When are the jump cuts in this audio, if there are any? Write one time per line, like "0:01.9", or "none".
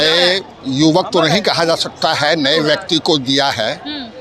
none